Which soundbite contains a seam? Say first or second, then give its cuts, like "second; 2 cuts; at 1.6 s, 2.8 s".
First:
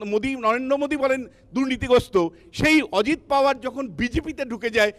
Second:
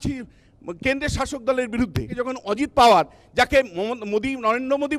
second; 1 cut; at 2.1 s